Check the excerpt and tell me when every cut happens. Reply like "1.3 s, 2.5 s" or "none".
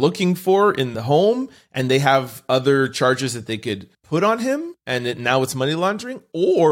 0.9 s, 3.9 s, 4.8 s